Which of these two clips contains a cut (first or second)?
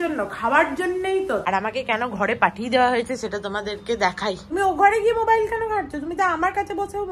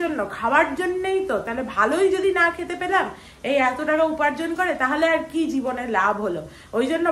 first